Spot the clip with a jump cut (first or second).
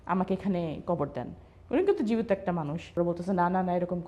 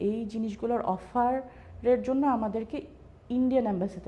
first